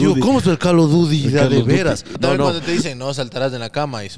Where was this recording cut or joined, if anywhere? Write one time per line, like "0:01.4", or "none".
0:02.1

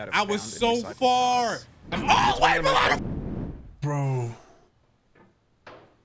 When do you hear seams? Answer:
0:03.0

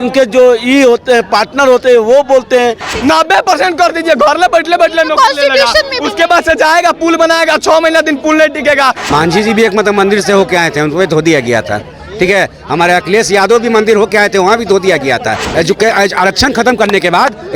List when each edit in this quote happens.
0:02.9
0:09.0
0:15.4

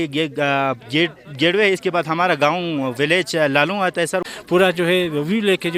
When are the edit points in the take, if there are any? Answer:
0:04.2

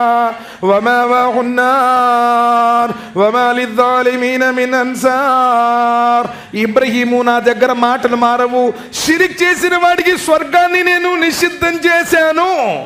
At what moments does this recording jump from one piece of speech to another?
none

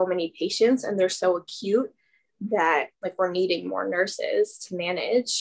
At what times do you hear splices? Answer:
0:02.9

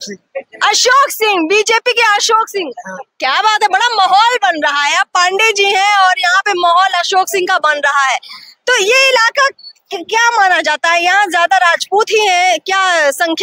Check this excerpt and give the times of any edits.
none

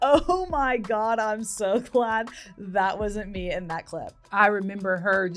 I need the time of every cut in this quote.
0:04.1

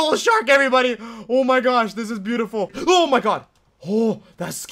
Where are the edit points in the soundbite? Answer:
0:02.8

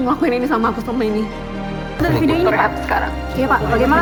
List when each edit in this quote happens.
none

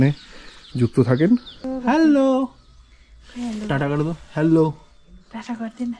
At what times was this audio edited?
0:01.6

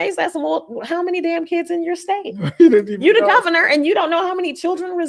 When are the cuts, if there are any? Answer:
none

